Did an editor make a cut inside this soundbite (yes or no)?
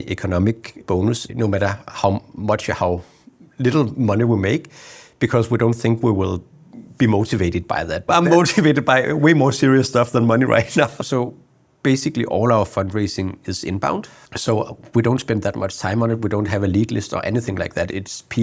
yes